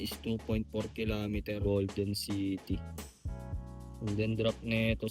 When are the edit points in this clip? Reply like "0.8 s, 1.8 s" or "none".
1.6 s